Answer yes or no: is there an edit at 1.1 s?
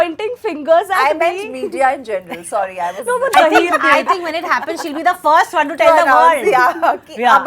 no